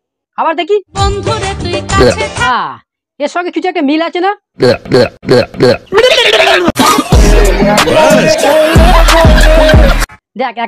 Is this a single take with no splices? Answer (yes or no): yes